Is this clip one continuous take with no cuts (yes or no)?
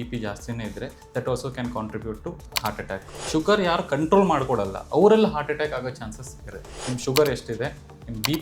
no